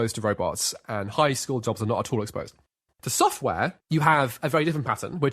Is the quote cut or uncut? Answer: cut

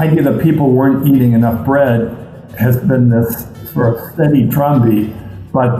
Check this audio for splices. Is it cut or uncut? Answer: uncut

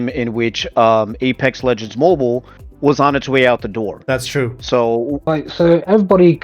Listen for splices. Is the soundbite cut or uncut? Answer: cut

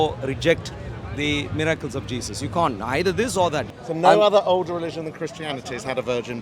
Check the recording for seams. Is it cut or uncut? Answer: cut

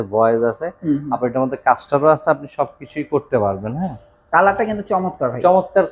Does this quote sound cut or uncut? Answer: uncut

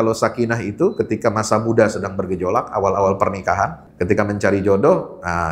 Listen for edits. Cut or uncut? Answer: cut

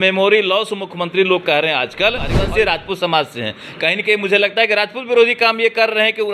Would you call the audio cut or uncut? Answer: cut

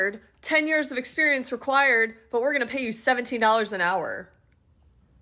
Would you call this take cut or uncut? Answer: uncut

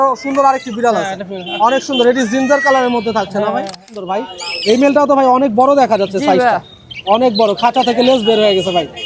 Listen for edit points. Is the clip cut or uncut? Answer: cut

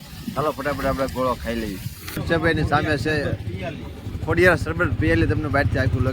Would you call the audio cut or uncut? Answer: cut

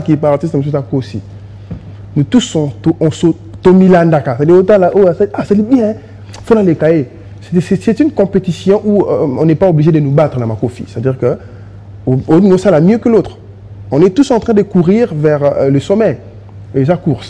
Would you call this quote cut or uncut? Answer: uncut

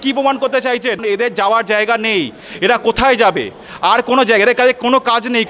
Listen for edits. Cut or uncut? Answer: cut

